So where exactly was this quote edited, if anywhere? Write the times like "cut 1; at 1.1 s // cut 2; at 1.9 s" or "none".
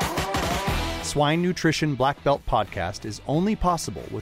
cut 1; at 0.9 s